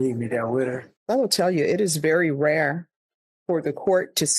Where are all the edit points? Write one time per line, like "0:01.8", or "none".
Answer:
0:00.9